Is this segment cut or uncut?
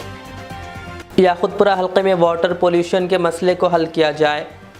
cut